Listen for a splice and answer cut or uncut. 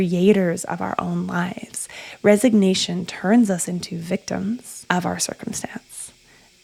uncut